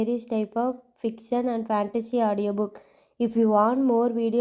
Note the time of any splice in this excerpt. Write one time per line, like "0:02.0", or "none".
none